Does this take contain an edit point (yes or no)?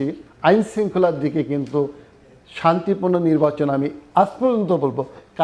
no